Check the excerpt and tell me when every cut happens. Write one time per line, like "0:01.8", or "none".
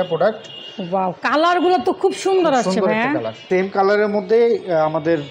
0:03.4